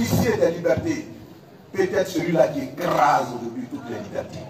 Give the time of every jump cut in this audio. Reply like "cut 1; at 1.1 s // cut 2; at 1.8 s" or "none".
none